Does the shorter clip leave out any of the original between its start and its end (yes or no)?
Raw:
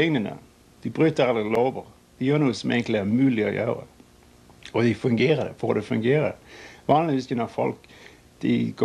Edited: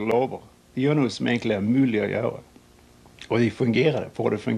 no